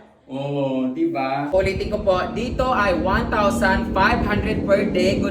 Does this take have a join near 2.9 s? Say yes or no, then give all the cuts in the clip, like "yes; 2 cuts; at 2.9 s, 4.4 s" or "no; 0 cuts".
no; 1 cut; at 1.5 s